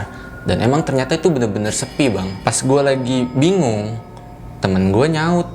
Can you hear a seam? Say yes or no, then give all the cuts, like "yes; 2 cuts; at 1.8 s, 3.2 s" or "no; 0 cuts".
yes; 1 cut; at 2.3 s